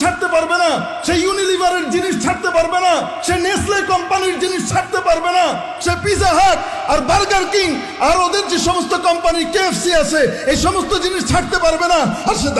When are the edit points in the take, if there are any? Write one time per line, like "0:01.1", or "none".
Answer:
none